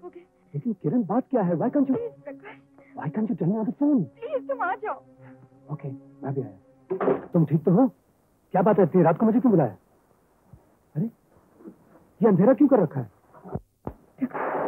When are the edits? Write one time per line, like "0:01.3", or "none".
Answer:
0:07.2